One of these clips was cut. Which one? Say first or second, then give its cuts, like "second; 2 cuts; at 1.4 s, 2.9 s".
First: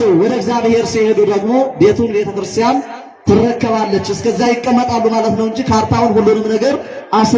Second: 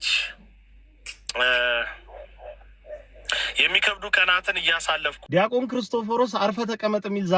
second; 1 cut; at 5.3 s